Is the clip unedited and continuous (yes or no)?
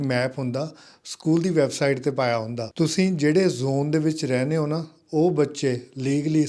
no